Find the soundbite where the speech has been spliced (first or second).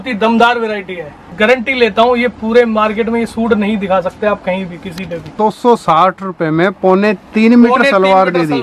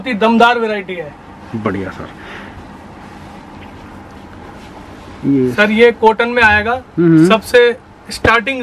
first